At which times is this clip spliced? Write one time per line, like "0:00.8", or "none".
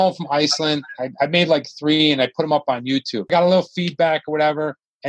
0:03.3